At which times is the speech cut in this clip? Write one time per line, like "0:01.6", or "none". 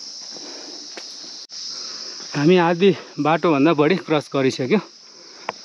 0:01.6